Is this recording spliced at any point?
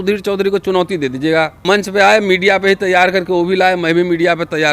yes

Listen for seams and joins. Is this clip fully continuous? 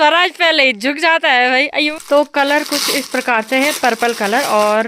no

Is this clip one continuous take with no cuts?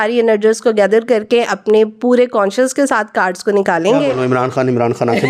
yes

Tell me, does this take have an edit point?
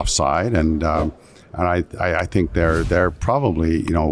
no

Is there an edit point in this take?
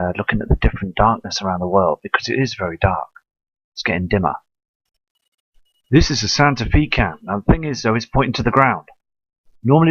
yes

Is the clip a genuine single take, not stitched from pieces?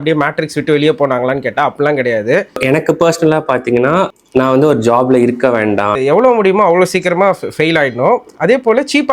no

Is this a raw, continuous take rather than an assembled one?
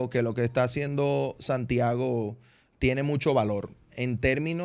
yes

